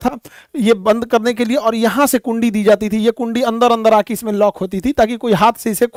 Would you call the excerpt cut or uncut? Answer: uncut